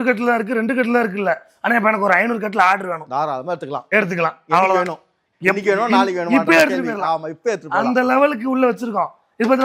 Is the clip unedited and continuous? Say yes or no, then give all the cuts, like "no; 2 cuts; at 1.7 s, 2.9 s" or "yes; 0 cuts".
yes; 0 cuts